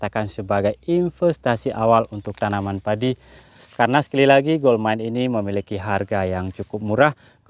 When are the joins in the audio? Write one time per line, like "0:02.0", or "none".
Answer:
0:03.5